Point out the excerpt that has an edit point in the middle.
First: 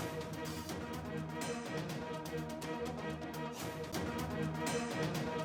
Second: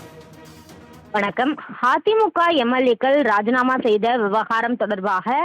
second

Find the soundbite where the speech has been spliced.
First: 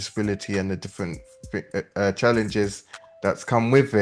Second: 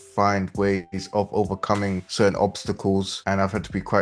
second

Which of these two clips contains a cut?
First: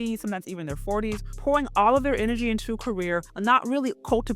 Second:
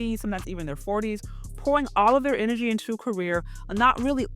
first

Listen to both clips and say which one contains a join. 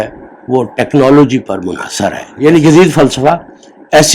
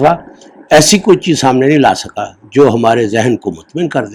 first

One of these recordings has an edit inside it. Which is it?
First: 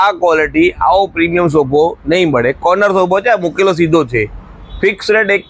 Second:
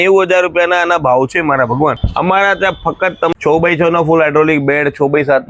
second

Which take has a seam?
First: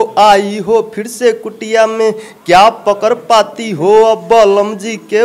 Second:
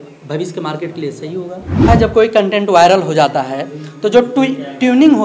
second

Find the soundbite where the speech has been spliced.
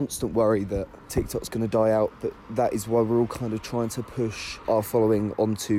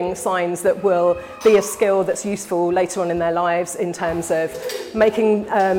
first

